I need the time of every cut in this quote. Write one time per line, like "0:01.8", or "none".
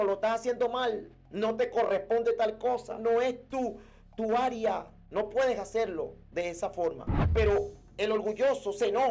0:05.0
0:07.1